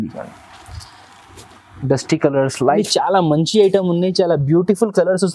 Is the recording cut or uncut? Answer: cut